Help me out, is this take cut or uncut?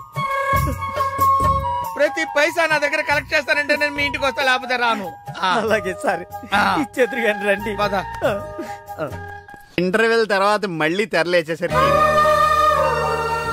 cut